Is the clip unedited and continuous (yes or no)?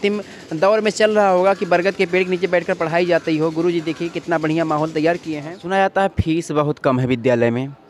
no